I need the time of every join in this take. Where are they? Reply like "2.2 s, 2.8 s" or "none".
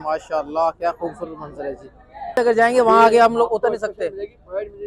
2.3 s